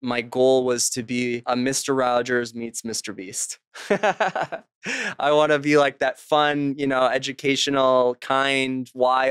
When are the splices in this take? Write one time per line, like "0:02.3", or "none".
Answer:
0:01.4